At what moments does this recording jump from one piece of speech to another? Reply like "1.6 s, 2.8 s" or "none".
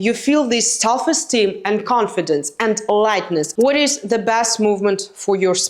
3.5 s